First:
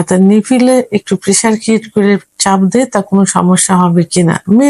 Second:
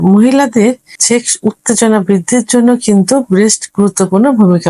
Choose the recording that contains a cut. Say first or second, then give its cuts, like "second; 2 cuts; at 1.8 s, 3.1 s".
second; 1 cut; at 0.9 s